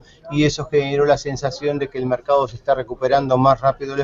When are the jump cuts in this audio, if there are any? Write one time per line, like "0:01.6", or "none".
0:02.5